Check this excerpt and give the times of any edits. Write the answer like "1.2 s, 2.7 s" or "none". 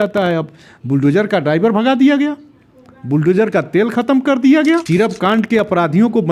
4.8 s